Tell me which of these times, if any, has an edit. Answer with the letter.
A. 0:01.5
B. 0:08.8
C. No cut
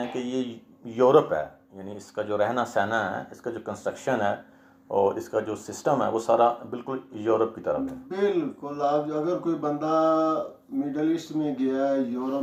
C